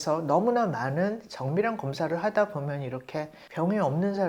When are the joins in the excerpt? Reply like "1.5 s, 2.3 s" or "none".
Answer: 3.4 s